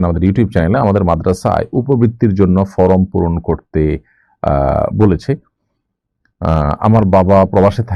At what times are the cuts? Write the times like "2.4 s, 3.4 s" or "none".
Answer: none